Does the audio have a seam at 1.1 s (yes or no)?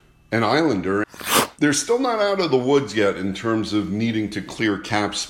yes